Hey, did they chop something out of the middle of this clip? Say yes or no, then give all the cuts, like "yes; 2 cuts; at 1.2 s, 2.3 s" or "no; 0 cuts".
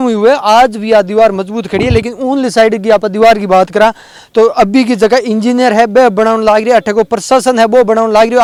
no; 0 cuts